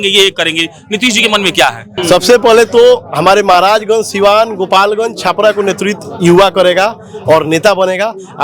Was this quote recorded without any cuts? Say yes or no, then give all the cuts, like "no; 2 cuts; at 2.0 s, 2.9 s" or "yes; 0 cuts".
no; 1 cut; at 1.9 s